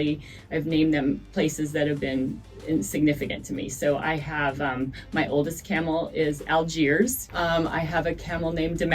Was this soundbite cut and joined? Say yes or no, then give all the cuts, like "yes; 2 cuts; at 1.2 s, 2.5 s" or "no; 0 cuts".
yes; 1 cut; at 7.2 s